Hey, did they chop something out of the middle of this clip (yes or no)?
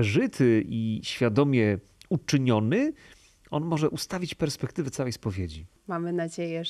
yes